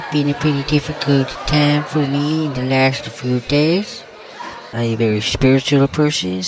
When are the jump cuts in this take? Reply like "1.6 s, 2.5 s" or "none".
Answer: 4.7 s